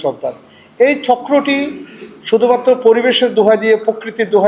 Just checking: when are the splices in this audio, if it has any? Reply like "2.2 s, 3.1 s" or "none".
none